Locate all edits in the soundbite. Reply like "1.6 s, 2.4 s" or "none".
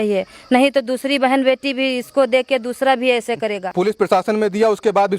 3.6 s